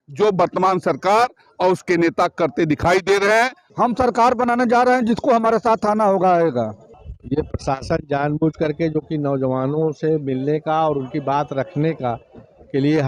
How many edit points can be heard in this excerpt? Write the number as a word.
one